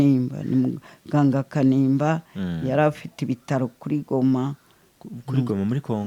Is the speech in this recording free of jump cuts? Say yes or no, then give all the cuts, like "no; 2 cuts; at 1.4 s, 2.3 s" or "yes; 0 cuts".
yes; 0 cuts